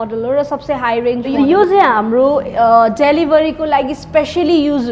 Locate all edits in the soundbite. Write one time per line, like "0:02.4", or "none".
0:01.4